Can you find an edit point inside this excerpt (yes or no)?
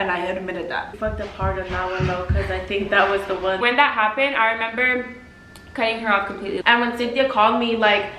yes